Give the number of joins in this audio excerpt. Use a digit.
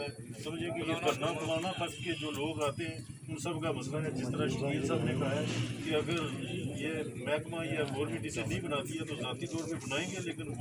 0